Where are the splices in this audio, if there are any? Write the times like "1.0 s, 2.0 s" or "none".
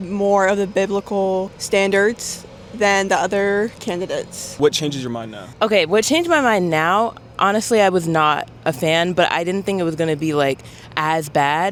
none